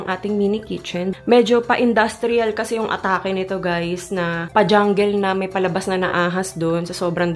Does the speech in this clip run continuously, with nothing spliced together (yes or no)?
no